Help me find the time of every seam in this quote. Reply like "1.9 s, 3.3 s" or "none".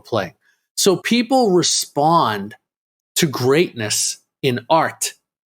1.0 s

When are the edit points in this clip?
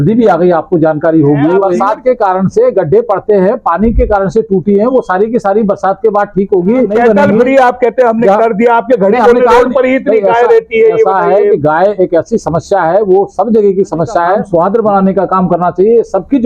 1.7 s, 6.9 s, 14.5 s

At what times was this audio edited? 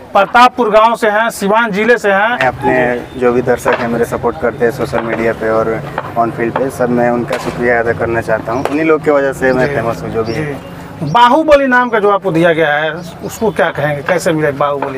2.4 s

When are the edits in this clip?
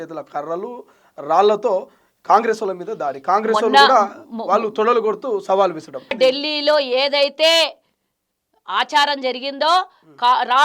6.2 s

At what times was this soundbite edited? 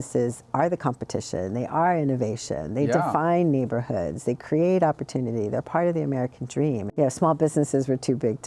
6.9 s

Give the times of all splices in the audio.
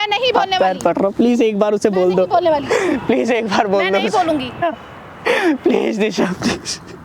4.6 s

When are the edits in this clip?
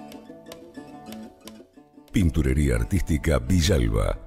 2.0 s

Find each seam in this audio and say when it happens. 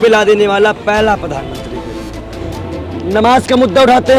2.3 s

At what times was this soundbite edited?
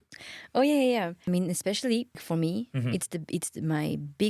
1.2 s, 2.2 s

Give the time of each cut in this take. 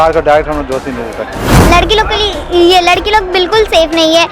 1.5 s

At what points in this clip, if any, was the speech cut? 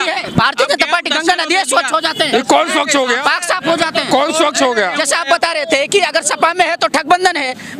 none

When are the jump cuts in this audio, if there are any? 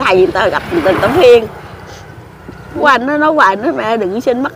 2.8 s

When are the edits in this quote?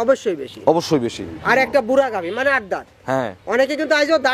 none

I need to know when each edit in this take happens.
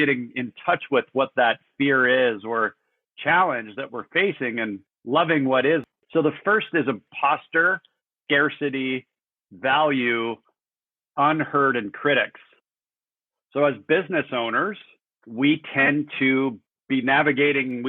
5.9 s, 7.1 s

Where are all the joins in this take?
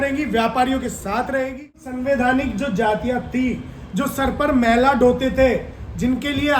1.9 s

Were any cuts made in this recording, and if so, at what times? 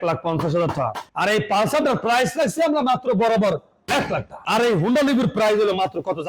1.1 s, 4.3 s

